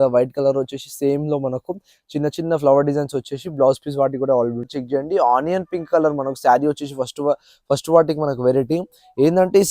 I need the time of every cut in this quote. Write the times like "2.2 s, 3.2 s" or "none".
4.7 s